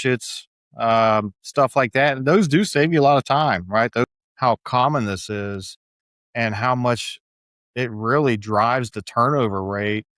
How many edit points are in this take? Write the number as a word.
one